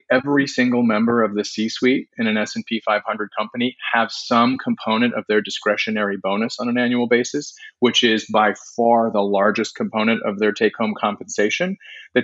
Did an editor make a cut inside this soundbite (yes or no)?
no